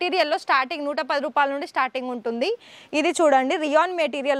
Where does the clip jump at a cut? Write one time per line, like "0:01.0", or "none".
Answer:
none